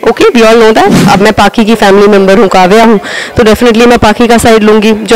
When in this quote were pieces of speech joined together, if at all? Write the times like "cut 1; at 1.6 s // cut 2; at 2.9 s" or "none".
cut 1; at 1.0 s

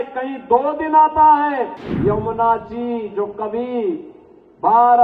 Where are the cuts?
cut 1; at 1.8 s

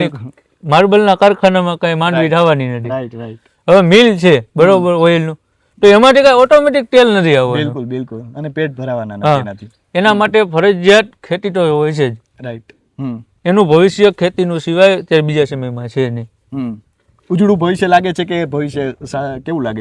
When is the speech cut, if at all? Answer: none

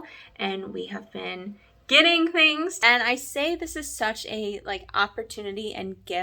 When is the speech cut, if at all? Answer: cut 1; at 2.8 s

